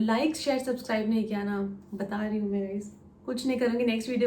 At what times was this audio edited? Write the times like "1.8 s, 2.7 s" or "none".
none